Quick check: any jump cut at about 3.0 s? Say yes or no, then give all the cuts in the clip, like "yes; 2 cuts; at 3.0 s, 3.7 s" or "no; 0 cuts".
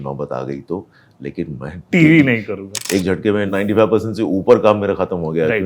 yes; 2 cuts; at 1.8 s, 3.0 s